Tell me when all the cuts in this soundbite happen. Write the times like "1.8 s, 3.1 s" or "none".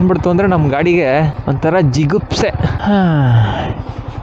1.4 s, 2.8 s